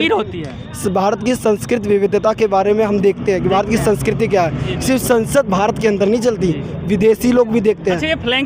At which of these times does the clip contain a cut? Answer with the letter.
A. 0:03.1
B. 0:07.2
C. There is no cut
C